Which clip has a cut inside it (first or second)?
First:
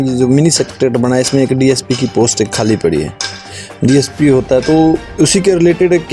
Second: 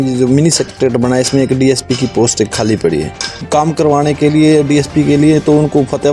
second